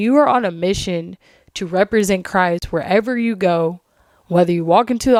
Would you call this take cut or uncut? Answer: uncut